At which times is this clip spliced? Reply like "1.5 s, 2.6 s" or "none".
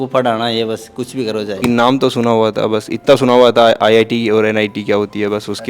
1.6 s